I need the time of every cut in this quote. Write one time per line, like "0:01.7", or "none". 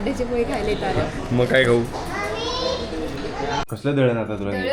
0:03.7

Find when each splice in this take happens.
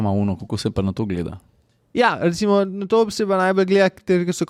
none

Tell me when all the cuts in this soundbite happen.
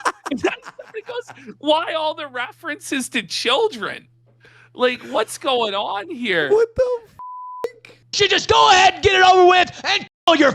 0:07.9

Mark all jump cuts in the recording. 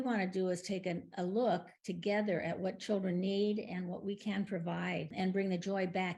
none

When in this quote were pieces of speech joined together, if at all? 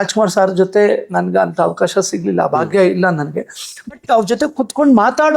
none

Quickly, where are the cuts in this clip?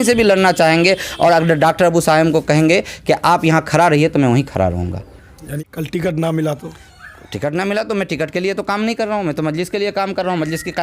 0:05.5

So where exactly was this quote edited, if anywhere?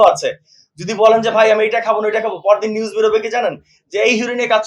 none

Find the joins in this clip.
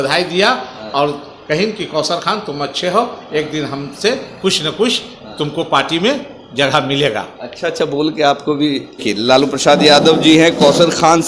0:09.0

